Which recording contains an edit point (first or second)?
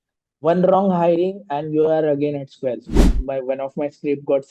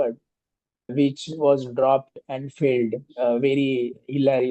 first